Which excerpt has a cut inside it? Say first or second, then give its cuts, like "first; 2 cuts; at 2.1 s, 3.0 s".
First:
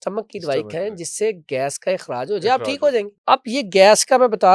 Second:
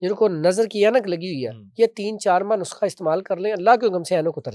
first; 1 cut; at 3.1 s